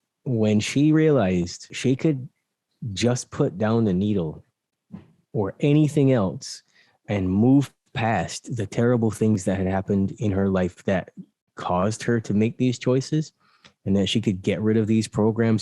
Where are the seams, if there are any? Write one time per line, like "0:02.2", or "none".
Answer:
0:01.7